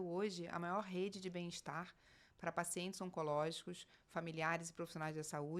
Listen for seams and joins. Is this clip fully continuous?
yes; 0 cuts

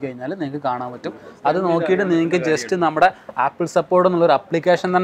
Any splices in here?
no; 0 cuts

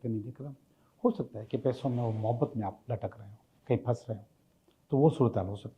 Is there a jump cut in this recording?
no; 0 cuts

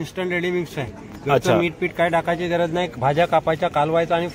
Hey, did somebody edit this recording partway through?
no; 0 cuts

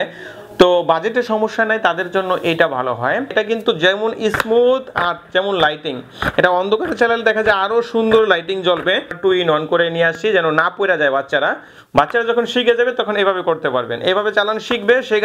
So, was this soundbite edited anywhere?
yes; 2 cuts; at 3.3 s, 9.1 s

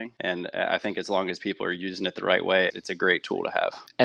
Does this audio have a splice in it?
no; 0 cuts

